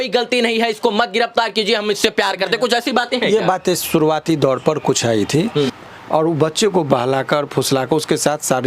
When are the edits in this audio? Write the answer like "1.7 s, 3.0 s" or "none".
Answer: 5.8 s